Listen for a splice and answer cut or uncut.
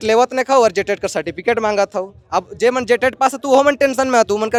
uncut